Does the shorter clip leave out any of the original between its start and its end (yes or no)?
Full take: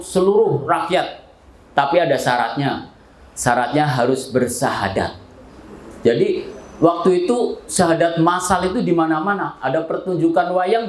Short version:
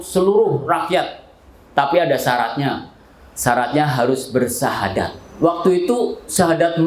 yes